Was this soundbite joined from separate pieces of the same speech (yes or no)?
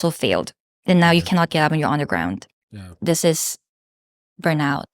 yes